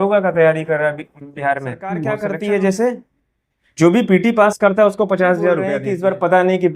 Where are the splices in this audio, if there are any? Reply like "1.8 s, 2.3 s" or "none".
2.1 s, 5.8 s